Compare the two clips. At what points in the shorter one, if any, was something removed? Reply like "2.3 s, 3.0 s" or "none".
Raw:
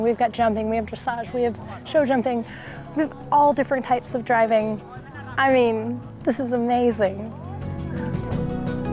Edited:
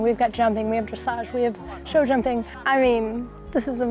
2.5 s